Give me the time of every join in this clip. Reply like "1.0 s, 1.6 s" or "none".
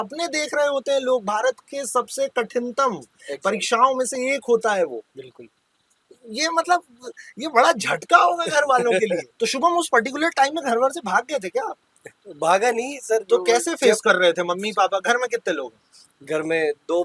5.1 s, 9.3 s